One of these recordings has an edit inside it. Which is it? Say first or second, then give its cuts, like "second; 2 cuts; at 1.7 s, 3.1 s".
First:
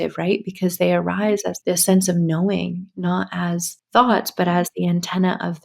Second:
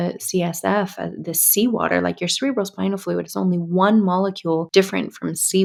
first; 2 cuts; at 1.5 s, 3.7 s